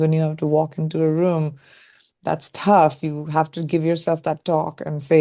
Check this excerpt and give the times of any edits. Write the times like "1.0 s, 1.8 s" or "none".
none